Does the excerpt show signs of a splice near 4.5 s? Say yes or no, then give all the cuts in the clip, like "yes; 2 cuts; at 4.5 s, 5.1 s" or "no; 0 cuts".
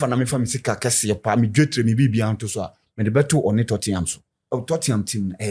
yes; 1 cut; at 4.5 s